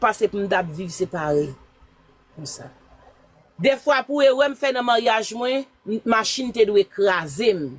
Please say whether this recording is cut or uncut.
uncut